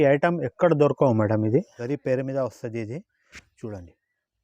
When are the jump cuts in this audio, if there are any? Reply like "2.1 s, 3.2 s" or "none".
1.8 s